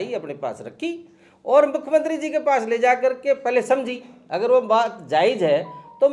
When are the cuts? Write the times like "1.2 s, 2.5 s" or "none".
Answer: none